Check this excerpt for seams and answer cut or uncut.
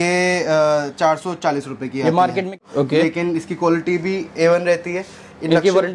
cut